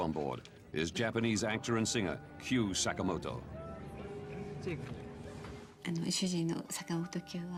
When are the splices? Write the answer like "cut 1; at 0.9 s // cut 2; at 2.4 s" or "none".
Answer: none